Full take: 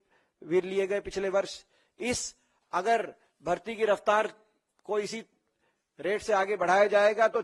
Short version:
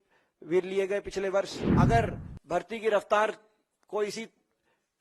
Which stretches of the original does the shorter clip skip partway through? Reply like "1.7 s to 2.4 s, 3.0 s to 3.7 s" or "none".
1.6 s to 2.6 s